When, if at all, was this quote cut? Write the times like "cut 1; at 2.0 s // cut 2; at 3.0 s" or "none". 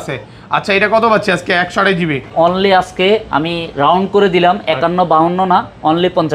cut 1; at 2.3 s